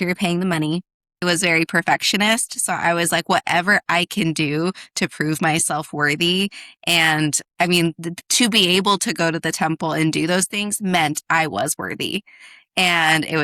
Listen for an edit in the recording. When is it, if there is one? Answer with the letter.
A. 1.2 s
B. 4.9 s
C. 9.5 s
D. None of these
A